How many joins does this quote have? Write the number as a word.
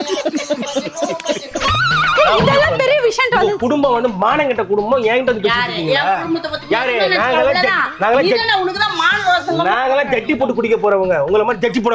zero